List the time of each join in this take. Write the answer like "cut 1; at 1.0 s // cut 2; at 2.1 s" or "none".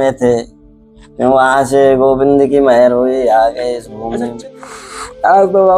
cut 1; at 4.5 s